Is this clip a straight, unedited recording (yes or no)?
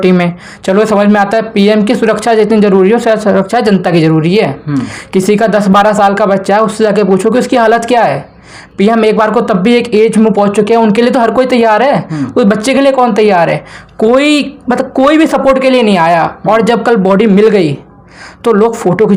yes